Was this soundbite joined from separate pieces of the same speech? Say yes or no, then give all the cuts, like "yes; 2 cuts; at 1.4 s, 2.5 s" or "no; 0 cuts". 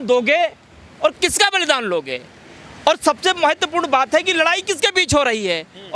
no; 0 cuts